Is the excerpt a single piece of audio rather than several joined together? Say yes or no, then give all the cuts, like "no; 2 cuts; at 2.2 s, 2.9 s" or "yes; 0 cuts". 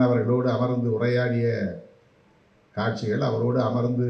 yes; 0 cuts